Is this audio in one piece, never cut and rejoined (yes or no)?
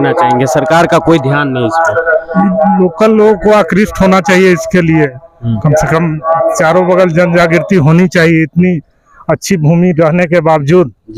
yes